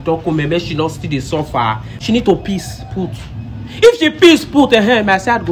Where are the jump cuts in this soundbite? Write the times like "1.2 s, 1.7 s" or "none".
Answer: 1.9 s